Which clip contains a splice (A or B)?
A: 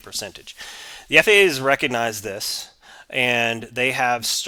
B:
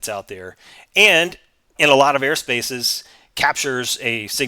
B